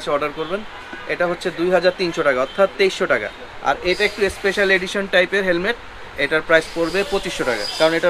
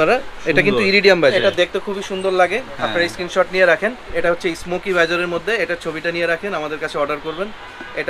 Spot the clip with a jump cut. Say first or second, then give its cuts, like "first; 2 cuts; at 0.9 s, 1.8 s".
second; 2 cuts; at 1.3 s, 4.1 s